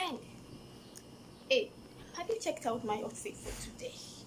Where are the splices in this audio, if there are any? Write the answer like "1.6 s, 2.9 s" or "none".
none